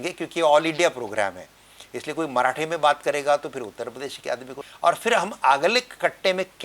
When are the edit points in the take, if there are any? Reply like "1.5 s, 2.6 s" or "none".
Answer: 4.6 s